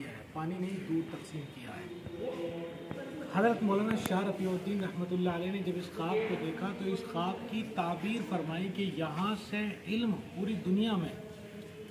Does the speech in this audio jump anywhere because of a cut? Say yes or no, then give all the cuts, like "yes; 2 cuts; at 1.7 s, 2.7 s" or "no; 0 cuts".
no; 0 cuts